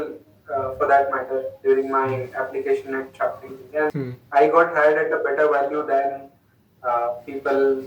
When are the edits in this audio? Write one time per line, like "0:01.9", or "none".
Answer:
0:03.9